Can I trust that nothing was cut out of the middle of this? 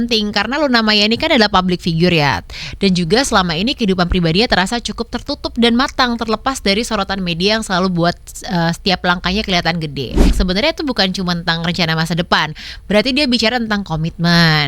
no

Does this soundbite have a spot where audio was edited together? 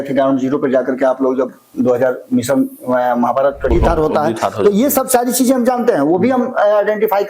yes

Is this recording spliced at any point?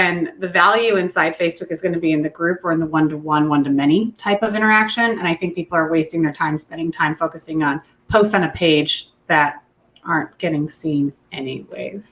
no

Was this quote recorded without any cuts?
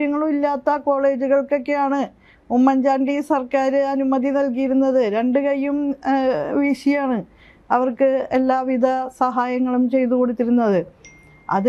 yes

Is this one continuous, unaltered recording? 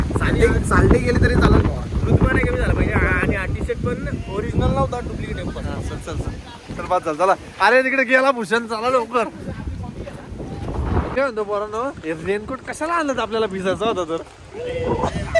yes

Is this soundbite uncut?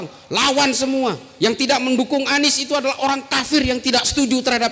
yes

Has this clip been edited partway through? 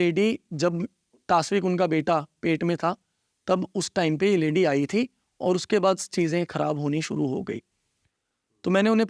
no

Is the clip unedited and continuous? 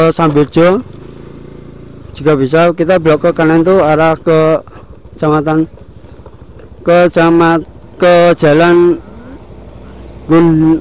yes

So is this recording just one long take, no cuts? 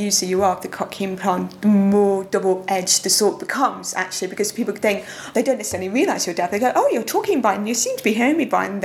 no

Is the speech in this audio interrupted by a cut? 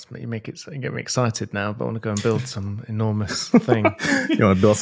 no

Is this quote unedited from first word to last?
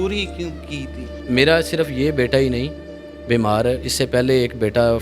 no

